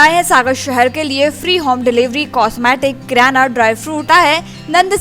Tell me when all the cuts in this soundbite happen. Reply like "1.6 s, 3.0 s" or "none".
4.0 s